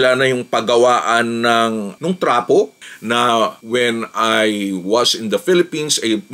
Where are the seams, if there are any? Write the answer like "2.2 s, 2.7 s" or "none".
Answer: 2.8 s